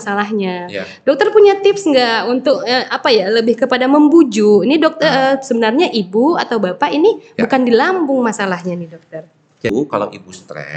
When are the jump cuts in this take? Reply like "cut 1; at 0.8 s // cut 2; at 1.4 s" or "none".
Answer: cut 1; at 9.7 s